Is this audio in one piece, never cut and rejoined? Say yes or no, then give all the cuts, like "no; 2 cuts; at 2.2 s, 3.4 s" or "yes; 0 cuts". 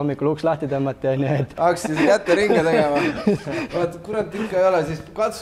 no; 1 cut; at 1.5 s